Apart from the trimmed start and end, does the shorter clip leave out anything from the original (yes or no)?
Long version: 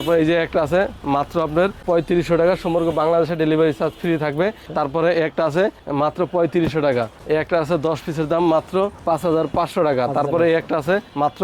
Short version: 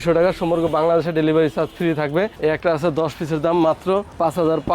yes